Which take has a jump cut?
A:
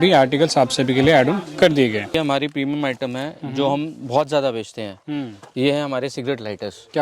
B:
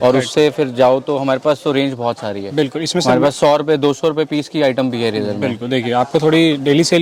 A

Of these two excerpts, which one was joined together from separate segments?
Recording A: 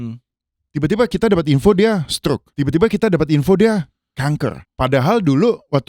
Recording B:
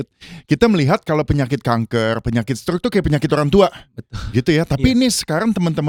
A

